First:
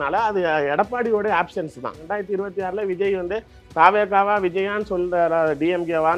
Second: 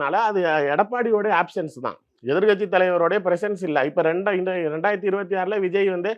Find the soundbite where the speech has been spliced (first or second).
first